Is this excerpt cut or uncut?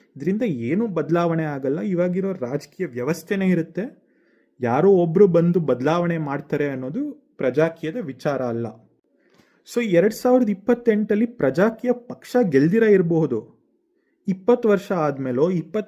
uncut